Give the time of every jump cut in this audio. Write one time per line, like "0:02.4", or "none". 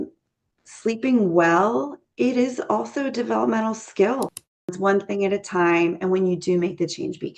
0:04.7

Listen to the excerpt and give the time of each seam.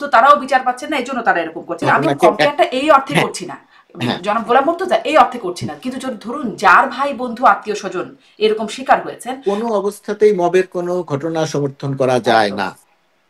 0:01.9
0:09.4

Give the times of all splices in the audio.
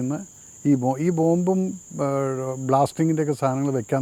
none

